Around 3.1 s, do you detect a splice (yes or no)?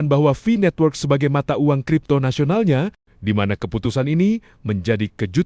yes